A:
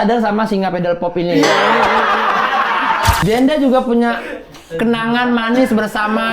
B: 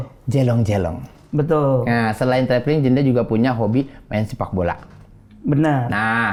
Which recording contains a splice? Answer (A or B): A